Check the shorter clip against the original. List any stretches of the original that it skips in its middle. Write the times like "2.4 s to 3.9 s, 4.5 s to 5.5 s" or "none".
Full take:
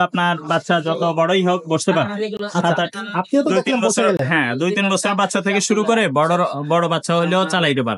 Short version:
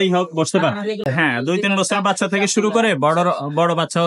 2.4 s to 4.2 s